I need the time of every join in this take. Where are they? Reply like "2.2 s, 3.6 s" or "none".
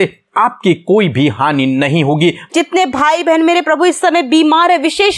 2.5 s

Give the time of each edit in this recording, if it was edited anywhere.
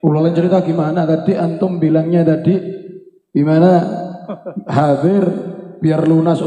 none

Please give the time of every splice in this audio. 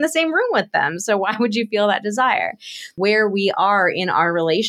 2.9 s

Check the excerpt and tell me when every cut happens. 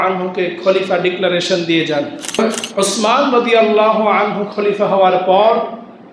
2.4 s

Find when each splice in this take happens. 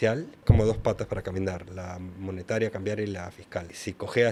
none

